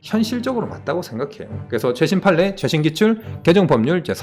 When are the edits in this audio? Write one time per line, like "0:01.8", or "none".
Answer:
none

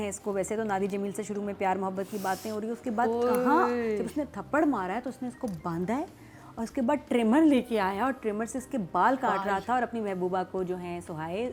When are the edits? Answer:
none

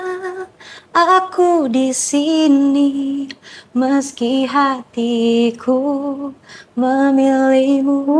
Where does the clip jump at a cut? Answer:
none

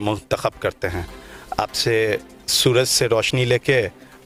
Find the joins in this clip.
none

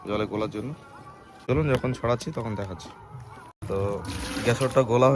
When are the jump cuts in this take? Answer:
0:01.4

